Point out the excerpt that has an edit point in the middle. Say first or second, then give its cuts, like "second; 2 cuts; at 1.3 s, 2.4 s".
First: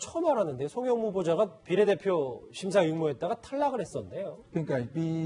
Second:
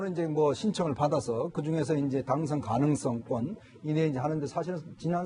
second; 1 cut; at 3.4 s